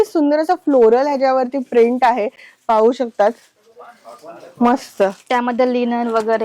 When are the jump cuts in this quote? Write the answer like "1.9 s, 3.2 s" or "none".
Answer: none